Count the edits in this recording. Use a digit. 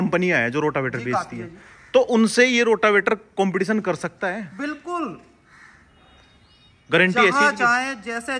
0